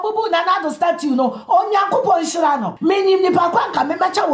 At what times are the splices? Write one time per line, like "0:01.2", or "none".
0:02.7